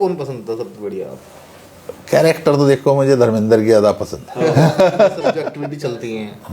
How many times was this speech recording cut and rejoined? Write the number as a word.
one